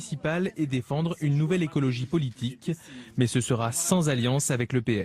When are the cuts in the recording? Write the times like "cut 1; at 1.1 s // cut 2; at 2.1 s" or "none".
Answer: none